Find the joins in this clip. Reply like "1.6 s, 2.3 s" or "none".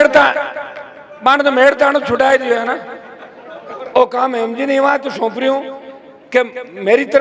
3.7 s